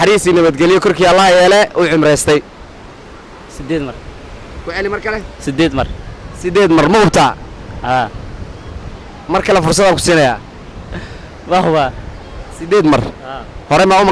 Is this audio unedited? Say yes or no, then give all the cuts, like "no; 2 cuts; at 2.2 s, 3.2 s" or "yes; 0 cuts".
yes; 0 cuts